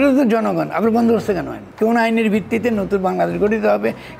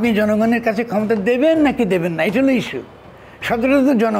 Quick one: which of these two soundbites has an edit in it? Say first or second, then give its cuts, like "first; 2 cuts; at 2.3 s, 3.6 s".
first; 1 cut; at 1.6 s